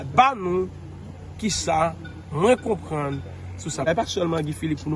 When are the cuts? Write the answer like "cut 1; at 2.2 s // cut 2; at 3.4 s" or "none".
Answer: cut 1; at 3.8 s